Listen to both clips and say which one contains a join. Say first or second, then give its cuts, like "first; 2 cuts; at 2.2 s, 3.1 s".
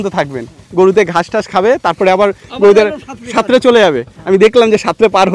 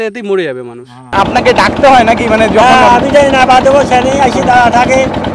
second; 1 cut; at 1.1 s